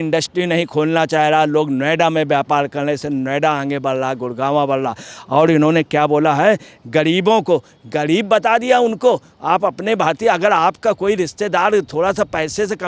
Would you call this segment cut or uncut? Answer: uncut